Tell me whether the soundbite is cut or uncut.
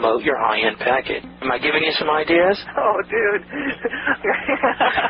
cut